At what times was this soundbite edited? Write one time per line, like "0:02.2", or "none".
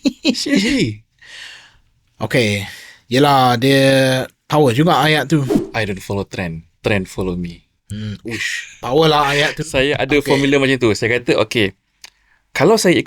0:05.6